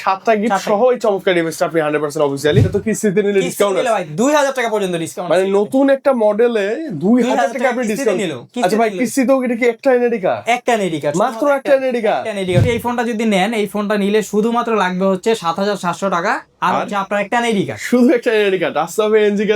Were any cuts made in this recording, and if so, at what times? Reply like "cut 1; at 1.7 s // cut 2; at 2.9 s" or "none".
cut 1; at 2.7 s // cut 2; at 12.6 s